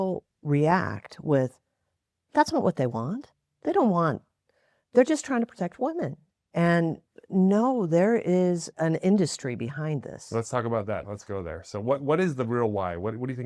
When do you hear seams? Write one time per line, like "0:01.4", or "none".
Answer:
0:08.7
0:11.1